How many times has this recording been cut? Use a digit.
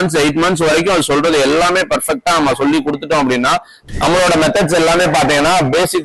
1